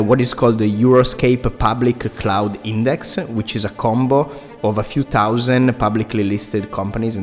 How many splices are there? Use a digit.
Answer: 0